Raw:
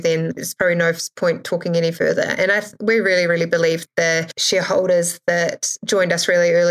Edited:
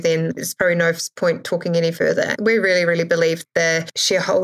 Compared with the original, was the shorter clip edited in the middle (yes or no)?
yes